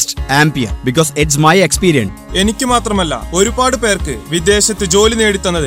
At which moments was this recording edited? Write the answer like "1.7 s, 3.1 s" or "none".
2.2 s